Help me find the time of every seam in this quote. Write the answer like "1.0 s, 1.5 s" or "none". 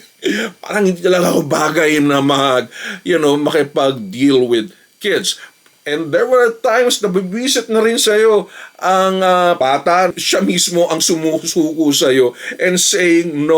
5.7 s, 9.8 s